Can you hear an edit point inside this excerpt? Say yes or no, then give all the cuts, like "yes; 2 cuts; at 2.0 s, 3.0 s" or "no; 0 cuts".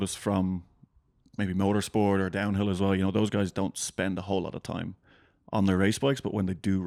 no; 0 cuts